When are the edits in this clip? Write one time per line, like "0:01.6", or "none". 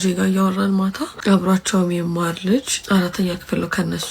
0:01.1
0:02.8